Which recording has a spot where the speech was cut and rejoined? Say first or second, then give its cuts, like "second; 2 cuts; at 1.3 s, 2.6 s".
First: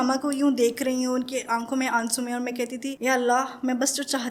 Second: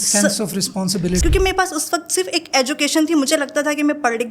second; 1 cut; at 1.2 s